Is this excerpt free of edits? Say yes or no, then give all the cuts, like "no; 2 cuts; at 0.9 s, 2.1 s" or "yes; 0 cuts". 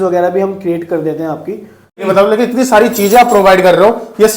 no; 1 cut; at 2.0 s